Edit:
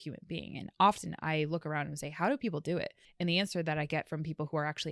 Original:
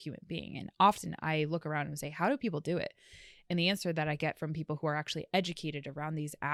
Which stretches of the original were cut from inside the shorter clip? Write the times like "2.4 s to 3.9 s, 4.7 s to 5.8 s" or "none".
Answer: 3.0 s to 3.3 s